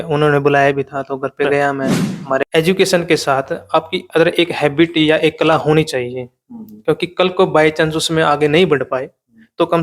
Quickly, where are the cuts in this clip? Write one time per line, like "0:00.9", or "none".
0:02.4